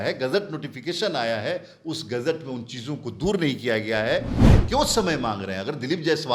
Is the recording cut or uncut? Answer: cut